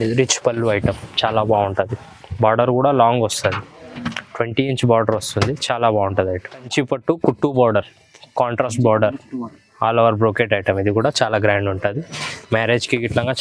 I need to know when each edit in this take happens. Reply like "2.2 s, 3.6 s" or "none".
6.7 s